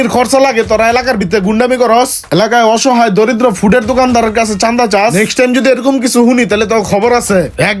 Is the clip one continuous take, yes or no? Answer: yes